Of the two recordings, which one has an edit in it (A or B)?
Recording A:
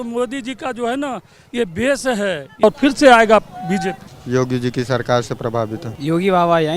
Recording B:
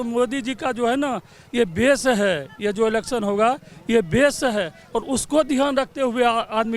A